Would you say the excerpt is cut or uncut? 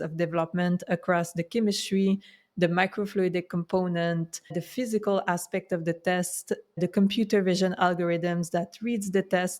cut